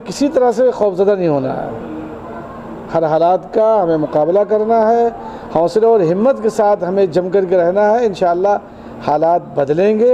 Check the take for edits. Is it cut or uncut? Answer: uncut